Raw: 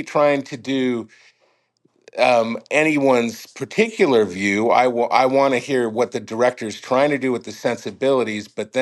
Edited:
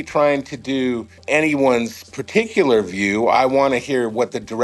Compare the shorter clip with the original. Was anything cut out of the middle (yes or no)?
yes